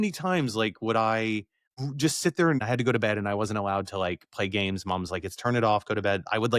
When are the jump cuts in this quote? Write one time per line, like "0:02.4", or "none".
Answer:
0:01.6
0:02.6